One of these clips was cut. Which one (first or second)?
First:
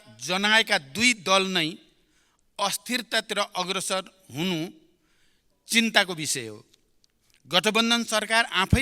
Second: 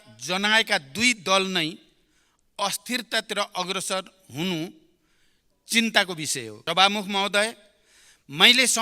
second